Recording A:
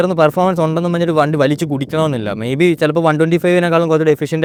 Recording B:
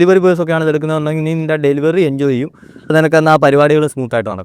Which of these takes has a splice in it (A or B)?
B